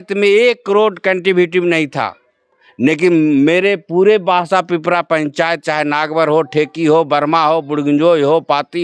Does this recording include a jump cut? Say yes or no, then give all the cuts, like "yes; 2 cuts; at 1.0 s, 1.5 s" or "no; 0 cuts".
no; 0 cuts